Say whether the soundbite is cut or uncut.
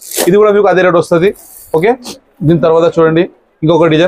uncut